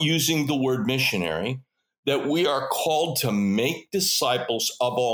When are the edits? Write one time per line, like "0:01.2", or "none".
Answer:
none